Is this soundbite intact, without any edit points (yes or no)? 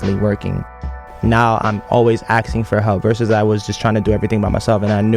no